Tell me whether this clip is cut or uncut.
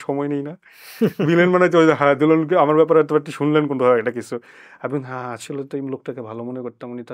uncut